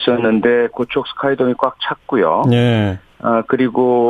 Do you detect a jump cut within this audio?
yes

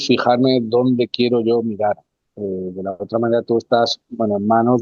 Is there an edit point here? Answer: no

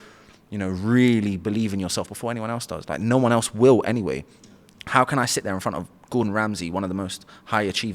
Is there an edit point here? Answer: no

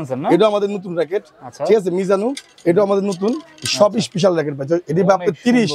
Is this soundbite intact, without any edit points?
yes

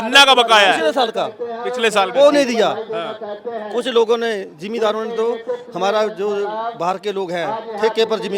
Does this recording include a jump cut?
no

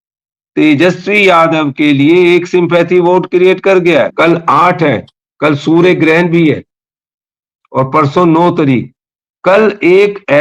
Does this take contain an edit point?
yes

